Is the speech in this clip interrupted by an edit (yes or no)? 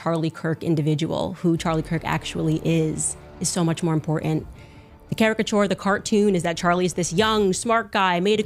no